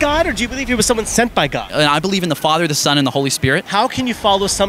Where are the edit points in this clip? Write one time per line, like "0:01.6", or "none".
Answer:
0:01.8
0:03.7